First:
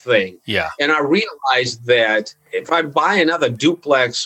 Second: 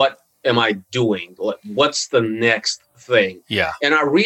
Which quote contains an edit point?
first; 1 cut; at 2.4 s

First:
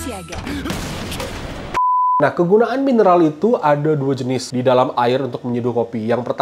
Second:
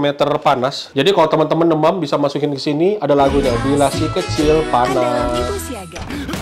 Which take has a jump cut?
first; 1 cut; at 2.2 s

